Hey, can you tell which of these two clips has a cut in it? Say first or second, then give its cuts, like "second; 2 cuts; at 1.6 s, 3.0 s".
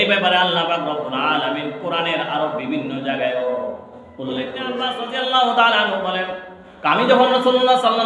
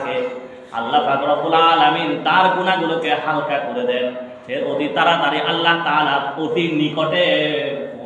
first; 1 cut; at 5.0 s